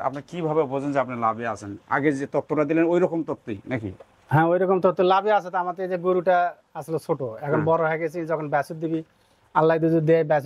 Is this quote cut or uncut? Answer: uncut